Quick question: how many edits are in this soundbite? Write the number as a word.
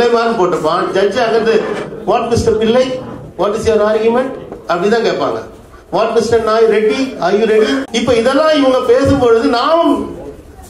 one